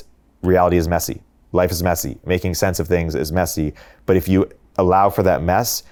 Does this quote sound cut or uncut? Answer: uncut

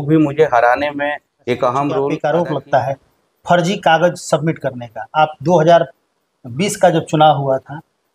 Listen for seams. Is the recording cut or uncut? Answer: cut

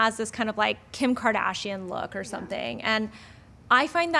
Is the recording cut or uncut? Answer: uncut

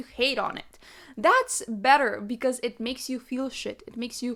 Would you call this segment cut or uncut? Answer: uncut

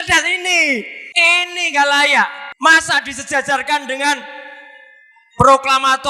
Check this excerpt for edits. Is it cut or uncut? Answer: cut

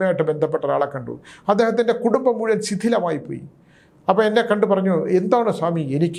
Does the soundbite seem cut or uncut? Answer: uncut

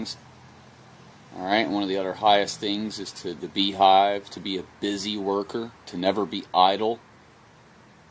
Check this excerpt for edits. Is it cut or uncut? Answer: uncut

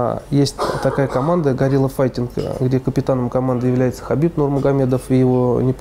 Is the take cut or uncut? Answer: uncut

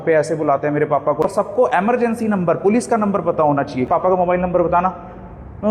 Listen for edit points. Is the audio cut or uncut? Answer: cut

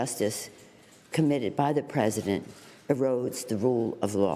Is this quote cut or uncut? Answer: uncut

